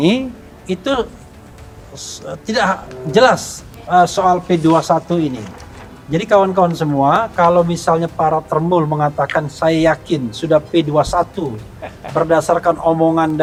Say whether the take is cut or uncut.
uncut